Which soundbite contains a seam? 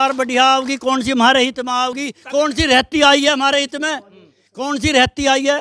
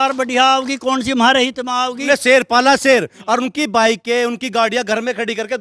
second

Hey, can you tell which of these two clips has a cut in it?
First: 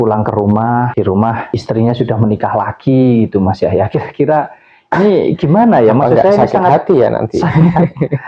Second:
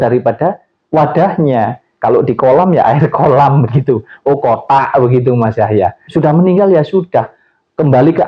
second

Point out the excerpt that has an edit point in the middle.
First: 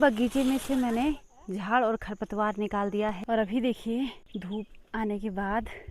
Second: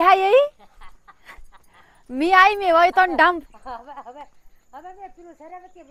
first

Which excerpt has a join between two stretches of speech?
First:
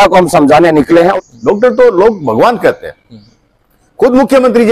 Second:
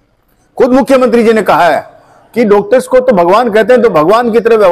first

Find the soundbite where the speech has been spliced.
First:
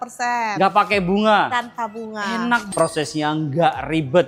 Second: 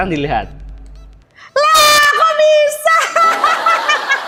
first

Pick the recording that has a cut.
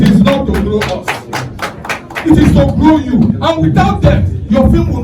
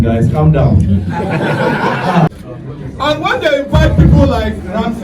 second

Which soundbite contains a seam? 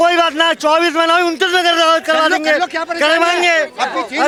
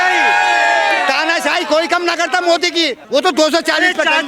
second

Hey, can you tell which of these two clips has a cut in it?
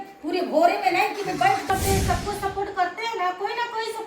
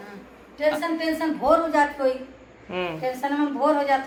first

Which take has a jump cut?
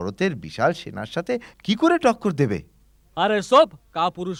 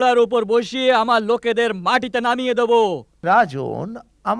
second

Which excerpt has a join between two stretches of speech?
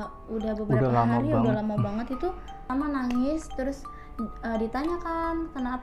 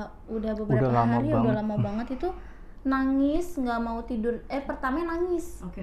first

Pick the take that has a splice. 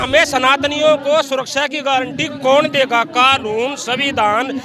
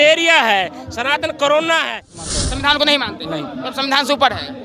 second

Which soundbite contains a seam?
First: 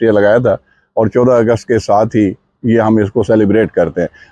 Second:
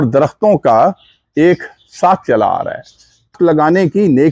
second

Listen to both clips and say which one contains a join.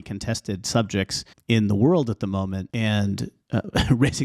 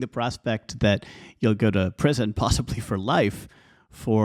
first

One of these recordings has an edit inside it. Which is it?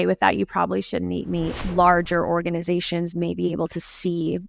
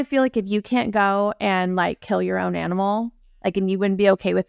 first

